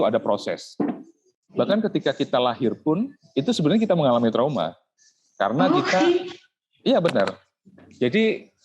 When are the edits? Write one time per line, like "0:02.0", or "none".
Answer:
0:01.2